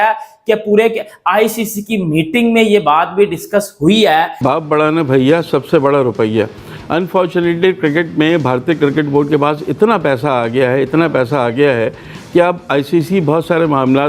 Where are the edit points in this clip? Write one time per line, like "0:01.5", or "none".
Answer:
0:04.3